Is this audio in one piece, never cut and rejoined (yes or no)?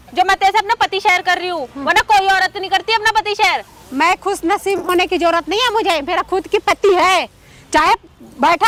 yes